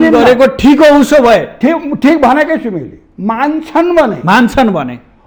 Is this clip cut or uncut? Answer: uncut